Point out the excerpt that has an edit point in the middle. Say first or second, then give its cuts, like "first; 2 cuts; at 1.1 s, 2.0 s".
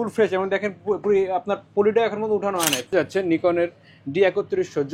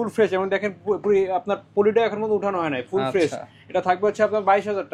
first; 1 cut; at 2.9 s